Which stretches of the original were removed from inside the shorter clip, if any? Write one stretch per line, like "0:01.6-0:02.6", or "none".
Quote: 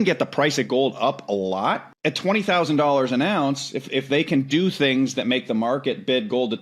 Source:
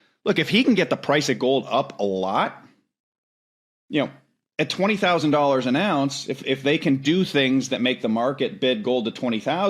0:02.6-0:04.4